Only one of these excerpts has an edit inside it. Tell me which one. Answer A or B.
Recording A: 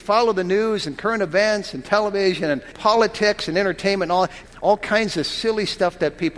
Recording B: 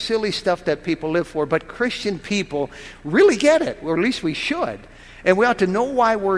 A